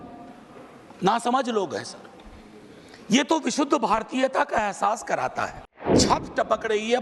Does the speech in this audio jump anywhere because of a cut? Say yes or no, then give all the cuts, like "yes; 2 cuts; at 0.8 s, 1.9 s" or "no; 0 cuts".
yes; 1 cut; at 6.0 s